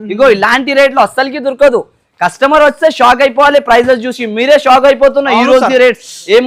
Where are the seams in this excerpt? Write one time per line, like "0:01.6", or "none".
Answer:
none